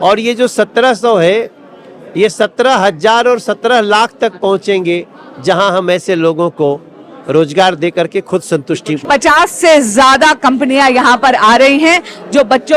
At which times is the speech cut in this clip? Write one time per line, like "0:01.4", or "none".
0:09.0